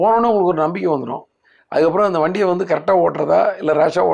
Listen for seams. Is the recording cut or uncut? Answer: uncut